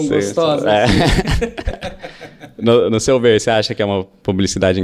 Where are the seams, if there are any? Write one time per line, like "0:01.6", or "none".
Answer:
none